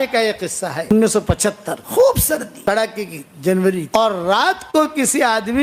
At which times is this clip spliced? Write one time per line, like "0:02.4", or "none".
0:00.9
0:01.7
0:02.5
0:03.9